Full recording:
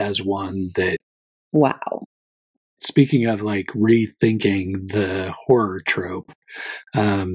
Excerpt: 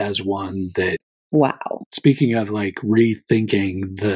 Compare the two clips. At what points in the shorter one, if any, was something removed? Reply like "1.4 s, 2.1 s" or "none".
1.1 s, 1.9 s